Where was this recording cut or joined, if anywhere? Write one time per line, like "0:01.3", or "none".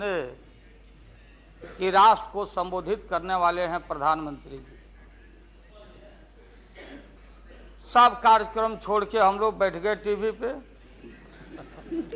0:07.2